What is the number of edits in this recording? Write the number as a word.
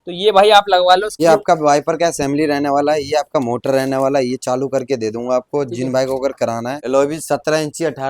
two